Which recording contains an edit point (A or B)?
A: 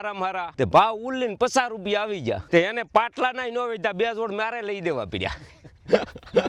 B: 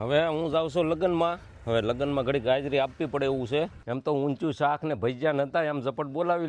B